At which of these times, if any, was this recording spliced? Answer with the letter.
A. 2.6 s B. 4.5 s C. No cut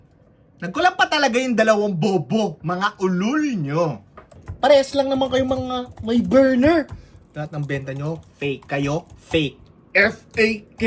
B